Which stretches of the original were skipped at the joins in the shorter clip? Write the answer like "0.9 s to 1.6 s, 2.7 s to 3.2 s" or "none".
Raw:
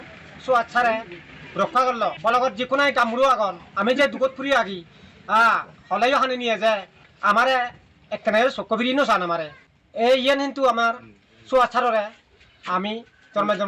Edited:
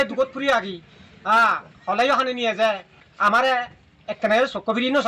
none